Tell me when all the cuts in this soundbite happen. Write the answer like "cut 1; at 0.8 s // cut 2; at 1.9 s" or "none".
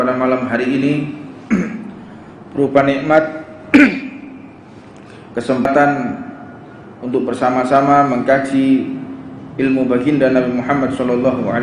cut 1; at 5.7 s